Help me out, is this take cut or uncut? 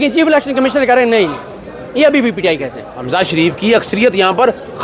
cut